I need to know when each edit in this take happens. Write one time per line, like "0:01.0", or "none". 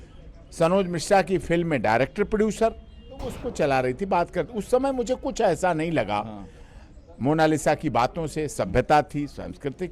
0:03.4

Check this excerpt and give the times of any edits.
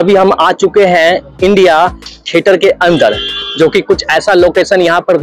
none

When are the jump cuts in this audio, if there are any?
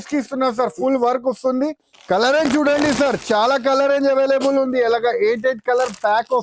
0:01.9

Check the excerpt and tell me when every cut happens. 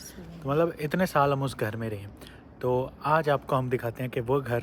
none

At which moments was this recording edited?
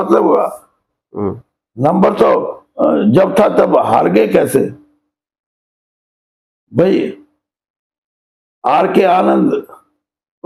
none

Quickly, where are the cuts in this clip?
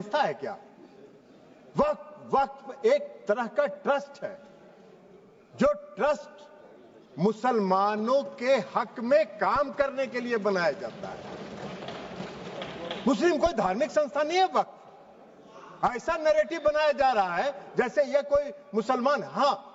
none

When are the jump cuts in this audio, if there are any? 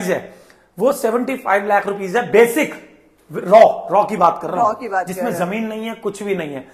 none

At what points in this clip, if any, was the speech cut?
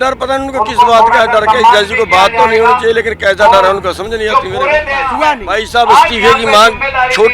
0:05.1

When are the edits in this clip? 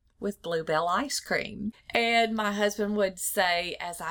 0:01.7

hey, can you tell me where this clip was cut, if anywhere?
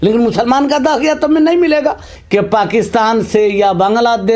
0:02.1

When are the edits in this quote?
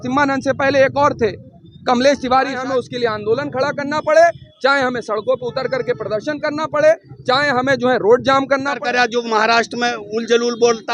0:02.6
0:08.7

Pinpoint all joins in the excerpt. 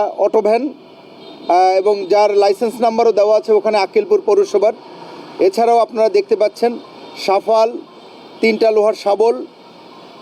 none

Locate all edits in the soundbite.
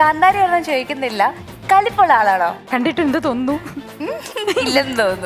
0:02.7
0:03.9

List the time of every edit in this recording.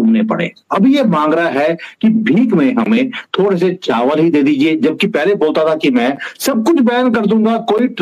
none

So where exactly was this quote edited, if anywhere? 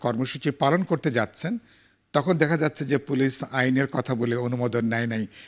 none

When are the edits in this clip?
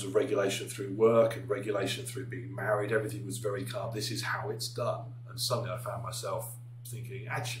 none

